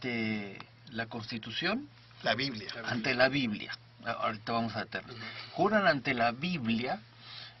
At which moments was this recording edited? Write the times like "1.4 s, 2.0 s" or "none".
2.8 s